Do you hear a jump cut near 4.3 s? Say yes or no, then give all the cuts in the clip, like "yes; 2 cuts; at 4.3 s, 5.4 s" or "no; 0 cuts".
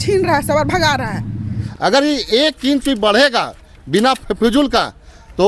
no; 1 cut; at 1.6 s